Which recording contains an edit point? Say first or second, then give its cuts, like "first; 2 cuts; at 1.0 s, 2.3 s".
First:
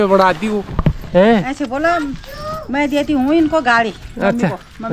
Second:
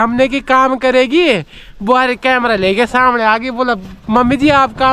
first; 1 cut; at 1.0 s